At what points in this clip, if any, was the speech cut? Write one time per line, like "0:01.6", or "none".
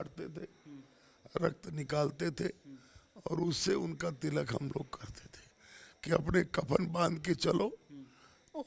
none